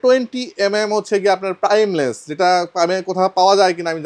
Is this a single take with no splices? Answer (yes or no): yes